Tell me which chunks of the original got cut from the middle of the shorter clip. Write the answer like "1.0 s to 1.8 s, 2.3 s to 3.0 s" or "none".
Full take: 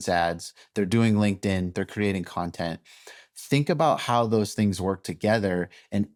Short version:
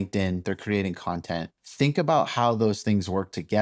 2.9 s to 3.3 s